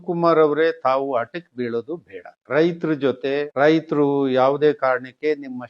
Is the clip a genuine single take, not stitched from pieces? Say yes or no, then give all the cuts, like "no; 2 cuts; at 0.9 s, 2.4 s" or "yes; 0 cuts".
yes; 0 cuts